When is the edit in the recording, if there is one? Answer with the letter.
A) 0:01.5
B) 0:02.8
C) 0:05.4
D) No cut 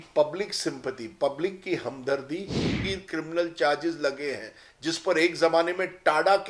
B